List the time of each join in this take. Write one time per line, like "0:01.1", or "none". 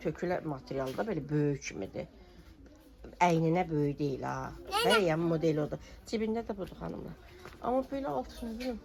none

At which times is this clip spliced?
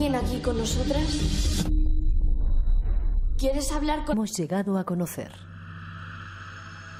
none

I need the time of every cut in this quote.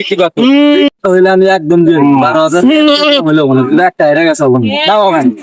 none

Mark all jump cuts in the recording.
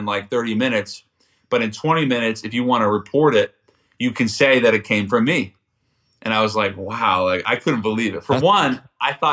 none

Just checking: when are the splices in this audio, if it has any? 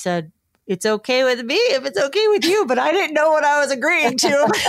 none

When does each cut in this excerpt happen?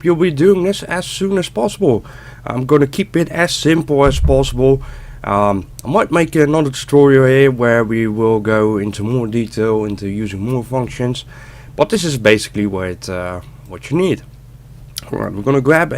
0:14.9

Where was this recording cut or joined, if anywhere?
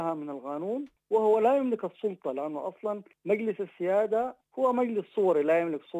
0:00.9
0:03.1
0:04.4

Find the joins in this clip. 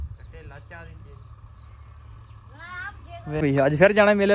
0:03.4

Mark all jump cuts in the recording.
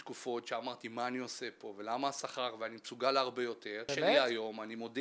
0:03.9

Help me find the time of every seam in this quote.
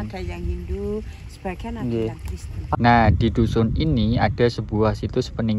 0:02.8

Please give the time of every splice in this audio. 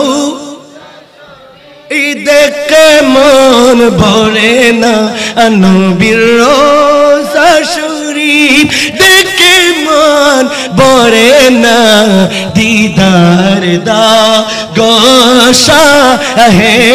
none

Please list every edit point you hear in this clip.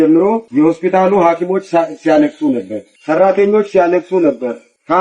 none

